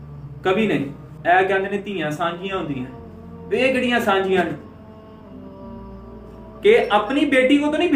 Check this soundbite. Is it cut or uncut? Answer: uncut